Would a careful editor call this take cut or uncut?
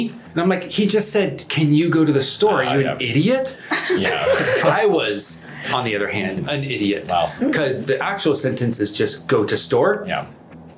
uncut